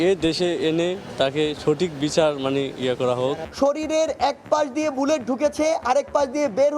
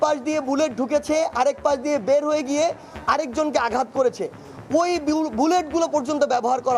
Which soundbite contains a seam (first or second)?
first